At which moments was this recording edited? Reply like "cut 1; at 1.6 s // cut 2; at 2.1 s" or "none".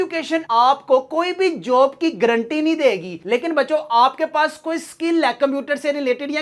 none